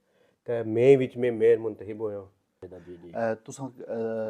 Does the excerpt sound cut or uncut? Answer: cut